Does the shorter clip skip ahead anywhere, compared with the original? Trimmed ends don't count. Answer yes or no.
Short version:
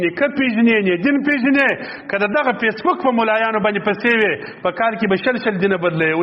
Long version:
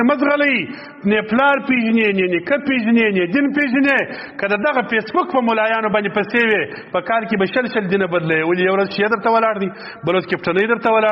no